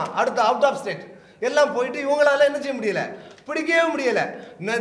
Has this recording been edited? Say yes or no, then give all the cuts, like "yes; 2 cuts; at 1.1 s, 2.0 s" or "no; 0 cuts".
no; 0 cuts